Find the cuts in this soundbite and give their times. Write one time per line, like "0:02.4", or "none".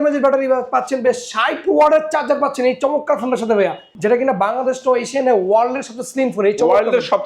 0:03.9